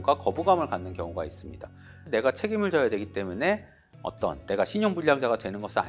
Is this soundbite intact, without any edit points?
no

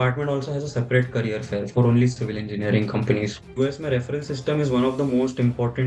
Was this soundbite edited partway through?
yes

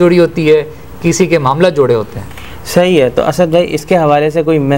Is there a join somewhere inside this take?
no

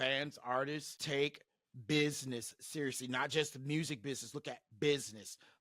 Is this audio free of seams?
no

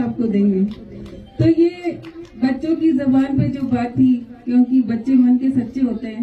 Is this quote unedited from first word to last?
yes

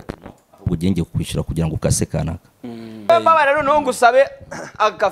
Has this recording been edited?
yes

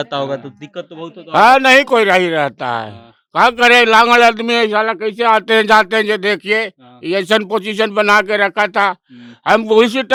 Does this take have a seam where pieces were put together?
no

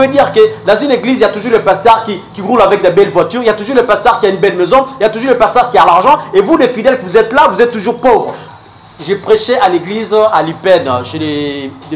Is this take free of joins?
no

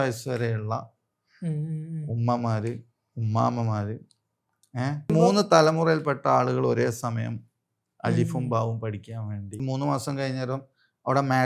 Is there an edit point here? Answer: yes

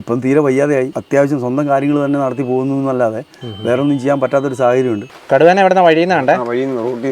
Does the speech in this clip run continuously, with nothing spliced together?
no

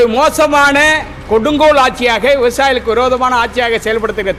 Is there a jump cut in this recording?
no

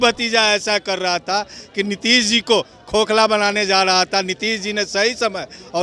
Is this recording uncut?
yes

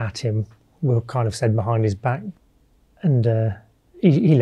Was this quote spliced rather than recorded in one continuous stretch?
yes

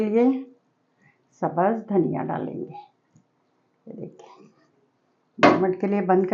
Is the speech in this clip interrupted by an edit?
no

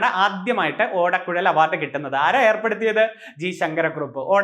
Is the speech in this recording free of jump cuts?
yes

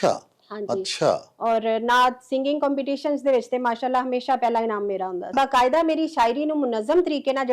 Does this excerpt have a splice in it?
yes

